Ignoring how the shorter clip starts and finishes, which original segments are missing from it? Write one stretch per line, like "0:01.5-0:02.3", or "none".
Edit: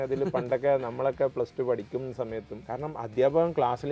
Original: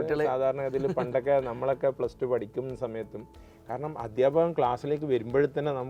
0:03.2-0:03.6